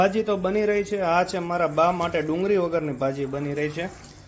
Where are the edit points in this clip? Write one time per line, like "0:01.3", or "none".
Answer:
none